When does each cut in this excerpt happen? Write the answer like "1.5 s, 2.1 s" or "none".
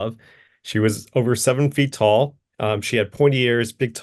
2.4 s